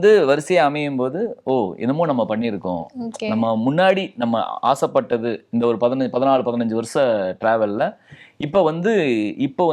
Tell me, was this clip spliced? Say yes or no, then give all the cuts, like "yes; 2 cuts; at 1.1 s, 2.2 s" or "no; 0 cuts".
no; 0 cuts